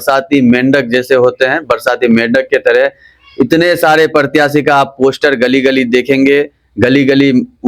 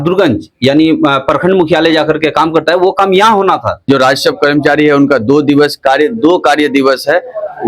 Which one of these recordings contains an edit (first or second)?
second